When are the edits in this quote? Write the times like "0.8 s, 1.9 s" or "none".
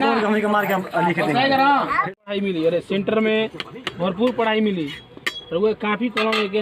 2.1 s